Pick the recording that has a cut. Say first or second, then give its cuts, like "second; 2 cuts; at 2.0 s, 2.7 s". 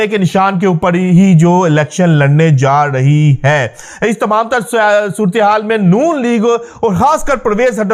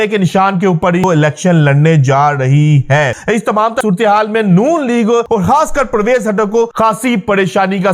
second; 4 cuts; at 1.0 s, 3.7 s, 5.3 s, 6.7 s